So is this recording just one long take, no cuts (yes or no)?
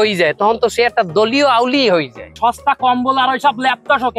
no